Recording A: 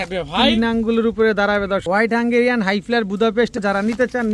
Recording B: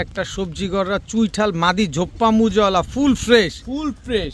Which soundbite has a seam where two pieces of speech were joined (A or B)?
A